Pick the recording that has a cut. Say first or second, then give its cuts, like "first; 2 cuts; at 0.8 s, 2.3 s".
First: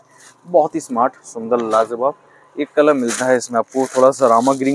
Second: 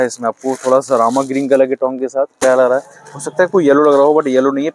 second; 1 cut; at 2.3 s